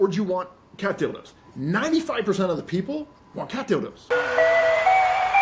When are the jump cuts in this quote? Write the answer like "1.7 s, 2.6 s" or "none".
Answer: 4.0 s